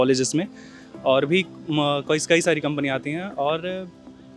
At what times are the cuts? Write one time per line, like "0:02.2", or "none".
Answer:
none